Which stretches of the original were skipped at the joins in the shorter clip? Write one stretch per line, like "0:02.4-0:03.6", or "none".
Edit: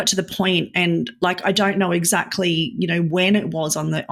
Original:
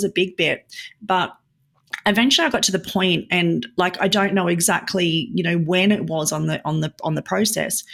none

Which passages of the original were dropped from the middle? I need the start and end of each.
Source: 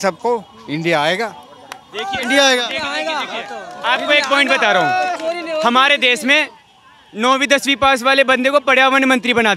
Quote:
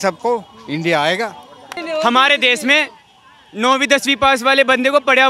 0:01.8-0:05.4

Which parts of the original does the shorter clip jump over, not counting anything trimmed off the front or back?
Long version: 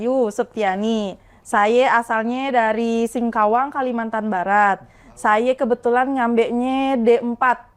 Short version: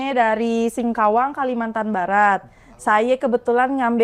none

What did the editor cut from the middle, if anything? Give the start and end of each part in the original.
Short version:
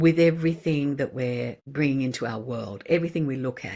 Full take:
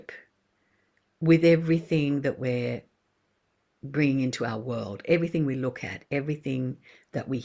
0:02.9-0:03.8

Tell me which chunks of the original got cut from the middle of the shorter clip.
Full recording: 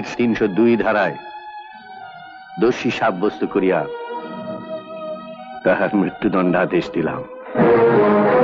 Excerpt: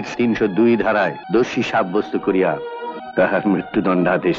0:01.2-0:02.5
0:04.2-0:05.4

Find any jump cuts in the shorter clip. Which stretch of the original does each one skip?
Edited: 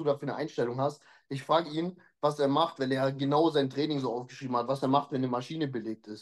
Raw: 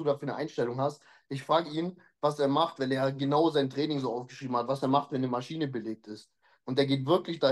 none

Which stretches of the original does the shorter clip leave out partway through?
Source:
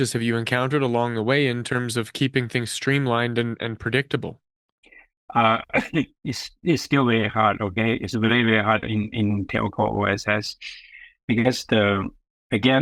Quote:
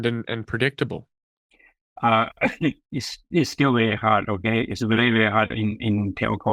none

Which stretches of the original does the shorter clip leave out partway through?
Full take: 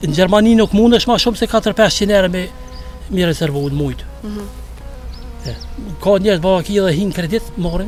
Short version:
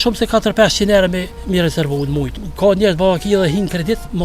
0:02.5-0:03.0
0:04.1-0:05.9

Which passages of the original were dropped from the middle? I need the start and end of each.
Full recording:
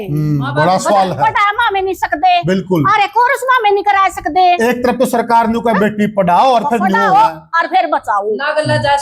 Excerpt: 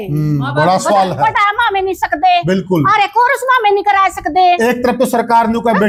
none

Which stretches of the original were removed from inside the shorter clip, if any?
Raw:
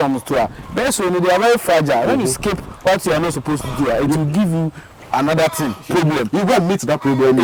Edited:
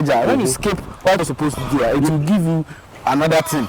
0:03.0-0:03.3

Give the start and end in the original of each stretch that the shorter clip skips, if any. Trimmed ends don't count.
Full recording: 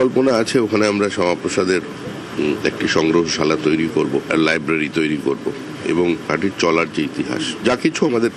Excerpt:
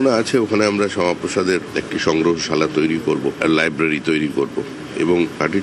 0:02.0-0:02.7

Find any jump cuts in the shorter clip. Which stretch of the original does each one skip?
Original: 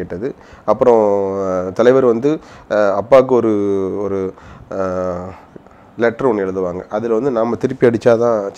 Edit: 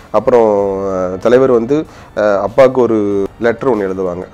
0:03.8-0:05.8

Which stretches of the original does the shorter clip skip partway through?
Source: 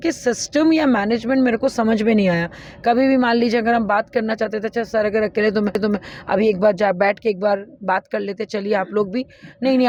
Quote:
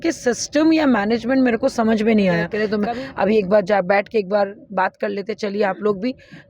0:02.6-0:05.7

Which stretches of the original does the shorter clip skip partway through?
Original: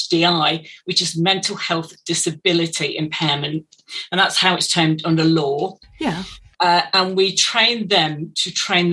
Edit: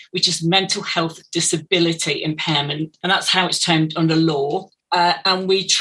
0:03.7-0:04.0
0:05.8-0:06.4

